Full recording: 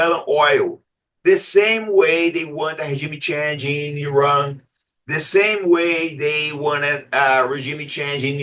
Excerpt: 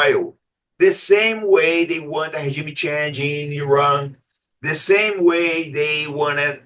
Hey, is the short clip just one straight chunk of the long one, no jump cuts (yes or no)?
yes